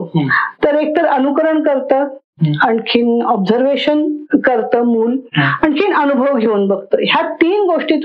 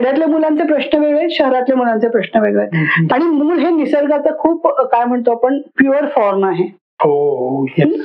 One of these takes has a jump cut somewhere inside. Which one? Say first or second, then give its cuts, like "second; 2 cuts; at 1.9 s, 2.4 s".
second; 2 cuts; at 3.1 s, 6.8 s